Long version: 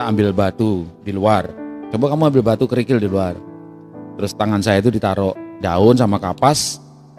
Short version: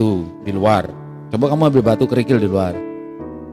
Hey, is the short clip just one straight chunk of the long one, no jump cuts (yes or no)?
yes